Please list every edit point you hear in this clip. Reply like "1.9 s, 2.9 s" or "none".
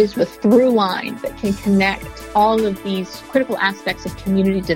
1.2 s, 2.1 s